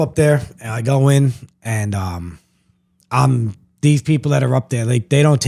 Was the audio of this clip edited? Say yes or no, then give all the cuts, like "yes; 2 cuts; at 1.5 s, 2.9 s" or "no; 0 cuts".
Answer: no; 0 cuts